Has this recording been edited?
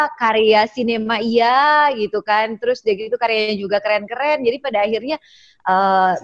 no; 0 cuts

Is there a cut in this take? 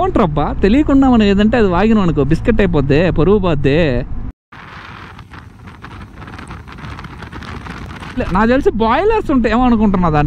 no; 0 cuts

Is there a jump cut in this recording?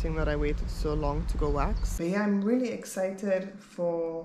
yes; 1 cut; at 2.0 s

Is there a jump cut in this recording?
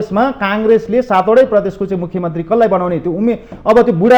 no; 0 cuts

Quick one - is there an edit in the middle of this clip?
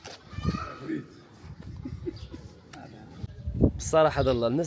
yes; 1 cut; at 3.2 s

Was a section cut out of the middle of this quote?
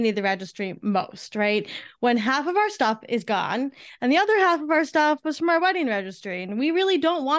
no; 0 cuts

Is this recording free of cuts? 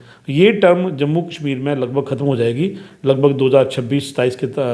yes; 0 cuts

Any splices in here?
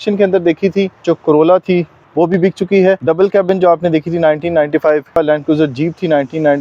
yes; 3 cuts; at 1.0 s, 3.0 s, 5.1 s

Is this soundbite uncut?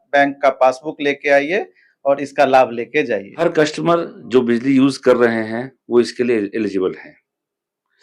no; 1 cut; at 3.3 s

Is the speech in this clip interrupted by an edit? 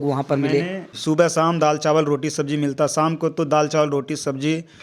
yes; 1 cut; at 0.9 s

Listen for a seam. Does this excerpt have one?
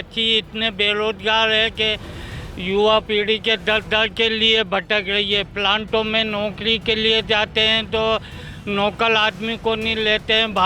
no; 0 cuts

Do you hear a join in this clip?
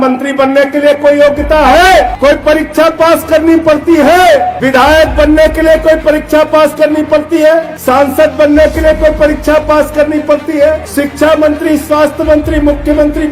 yes; 4 cuts; at 2.1 s, 4.6 s, 7.7 s, 10.8 s

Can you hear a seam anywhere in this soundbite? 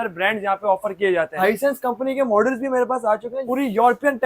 yes; 1 cut; at 1.4 s

